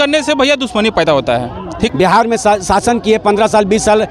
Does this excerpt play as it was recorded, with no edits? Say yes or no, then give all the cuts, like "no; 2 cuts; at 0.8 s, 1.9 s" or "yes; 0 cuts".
no; 1 cut; at 1.9 s